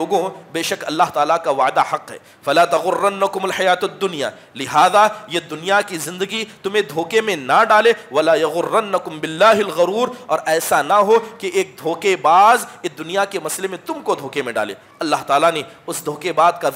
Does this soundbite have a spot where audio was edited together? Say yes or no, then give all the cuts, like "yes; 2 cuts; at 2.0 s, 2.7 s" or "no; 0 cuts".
no; 0 cuts